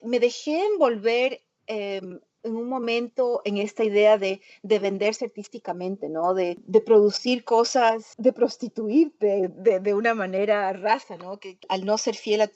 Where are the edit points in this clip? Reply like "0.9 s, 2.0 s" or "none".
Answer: 6.6 s, 8.1 s, 11.6 s